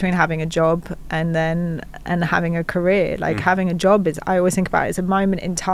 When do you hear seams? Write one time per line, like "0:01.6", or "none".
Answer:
none

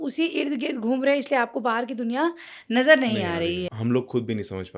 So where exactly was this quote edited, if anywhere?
0:03.7

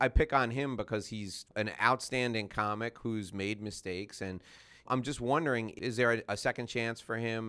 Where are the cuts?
0:01.5
0:04.8
0:05.7

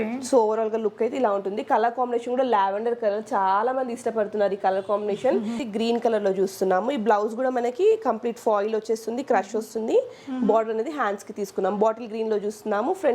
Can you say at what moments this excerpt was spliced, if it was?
0:05.6

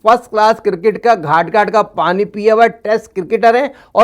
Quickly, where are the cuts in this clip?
none

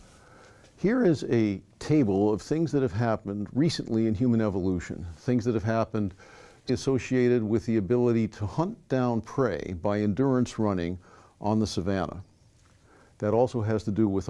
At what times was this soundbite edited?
none

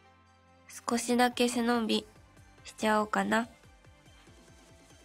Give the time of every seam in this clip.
0:00.8
0:03.6

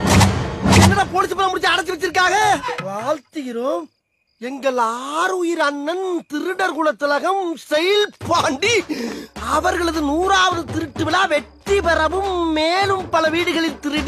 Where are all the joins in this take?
0:02.7

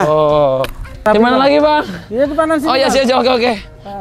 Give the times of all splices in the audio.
0:01.0

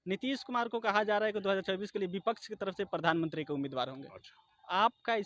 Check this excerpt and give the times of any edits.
none

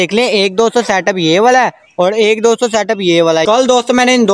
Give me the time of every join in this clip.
0:03.4

